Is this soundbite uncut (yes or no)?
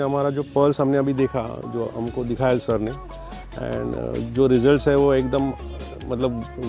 yes